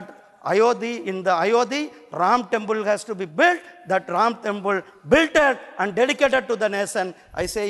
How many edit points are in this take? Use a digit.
0